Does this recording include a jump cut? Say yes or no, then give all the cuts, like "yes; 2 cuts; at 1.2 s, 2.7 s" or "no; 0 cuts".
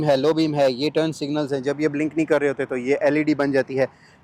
no; 0 cuts